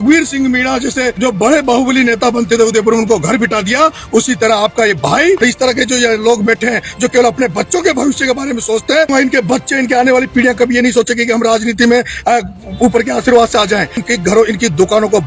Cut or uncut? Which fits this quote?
cut